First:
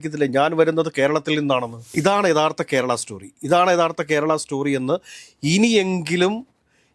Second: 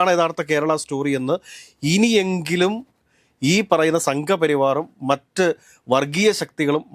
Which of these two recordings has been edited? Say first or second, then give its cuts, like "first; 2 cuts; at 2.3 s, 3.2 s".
first; 1 cut; at 1.9 s